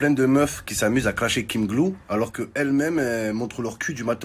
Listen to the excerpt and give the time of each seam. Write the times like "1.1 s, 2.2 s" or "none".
none